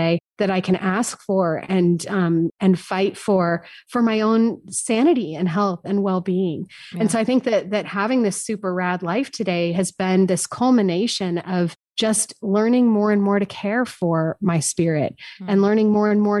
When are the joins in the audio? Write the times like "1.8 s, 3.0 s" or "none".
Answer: 2.5 s, 10.5 s